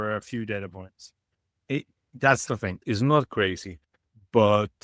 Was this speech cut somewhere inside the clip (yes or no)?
yes